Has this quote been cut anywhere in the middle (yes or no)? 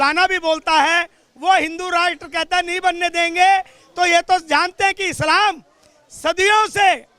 no